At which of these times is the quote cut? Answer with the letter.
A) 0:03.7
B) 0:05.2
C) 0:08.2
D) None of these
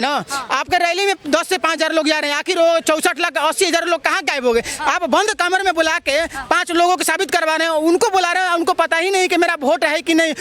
D